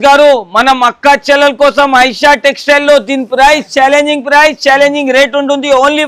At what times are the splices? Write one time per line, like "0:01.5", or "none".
none